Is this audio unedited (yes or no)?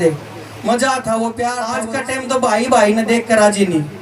no